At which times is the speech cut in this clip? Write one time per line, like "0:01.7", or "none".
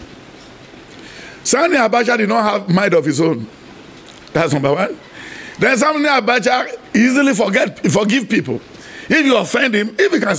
none